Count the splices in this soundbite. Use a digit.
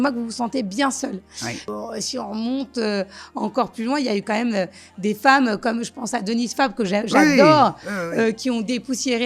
1